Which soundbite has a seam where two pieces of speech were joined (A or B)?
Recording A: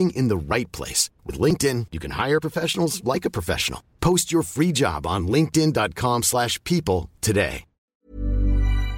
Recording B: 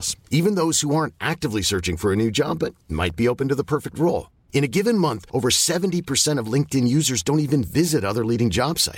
A